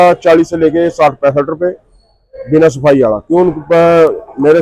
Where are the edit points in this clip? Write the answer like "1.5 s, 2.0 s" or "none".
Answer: none